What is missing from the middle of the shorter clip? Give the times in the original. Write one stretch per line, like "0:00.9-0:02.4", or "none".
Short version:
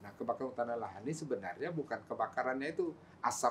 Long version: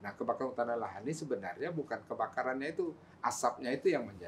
none